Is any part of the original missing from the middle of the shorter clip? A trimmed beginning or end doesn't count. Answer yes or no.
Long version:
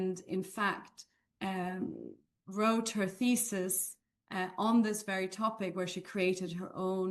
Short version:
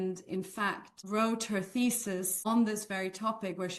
yes